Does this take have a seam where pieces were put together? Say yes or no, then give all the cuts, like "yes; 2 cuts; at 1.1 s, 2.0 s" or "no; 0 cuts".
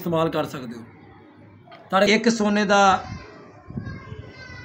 yes; 1 cut; at 2.1 s